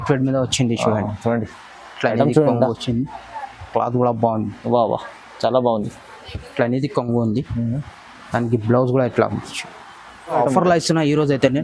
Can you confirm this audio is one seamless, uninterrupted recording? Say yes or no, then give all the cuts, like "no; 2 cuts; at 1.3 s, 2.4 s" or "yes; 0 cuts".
no; 1 cut; at 10.4 s